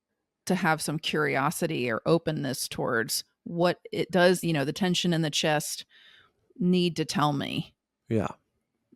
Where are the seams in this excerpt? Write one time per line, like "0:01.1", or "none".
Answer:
0:04.4